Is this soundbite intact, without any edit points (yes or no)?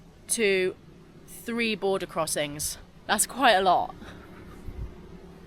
no